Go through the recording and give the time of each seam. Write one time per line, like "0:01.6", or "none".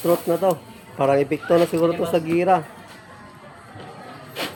none